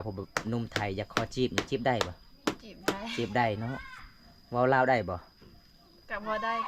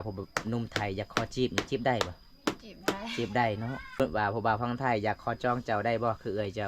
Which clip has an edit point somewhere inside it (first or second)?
second